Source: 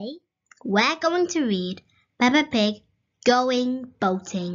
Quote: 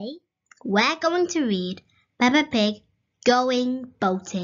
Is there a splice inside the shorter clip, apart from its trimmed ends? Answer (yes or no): no